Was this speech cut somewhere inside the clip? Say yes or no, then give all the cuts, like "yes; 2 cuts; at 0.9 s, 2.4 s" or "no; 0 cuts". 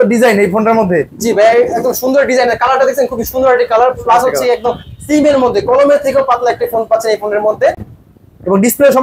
no; 0 cuts